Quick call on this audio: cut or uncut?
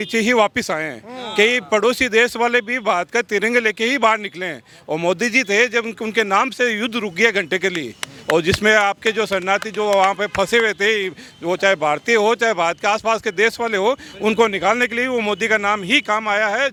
uncut